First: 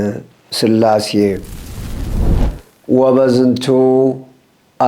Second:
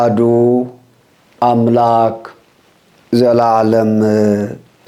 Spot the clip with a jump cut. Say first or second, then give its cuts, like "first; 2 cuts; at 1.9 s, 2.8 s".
first; 2 cuts; at 1.6 s, 2.5 s